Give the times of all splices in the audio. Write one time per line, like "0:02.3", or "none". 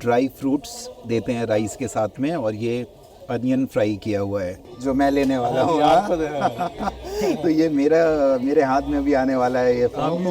0:04.6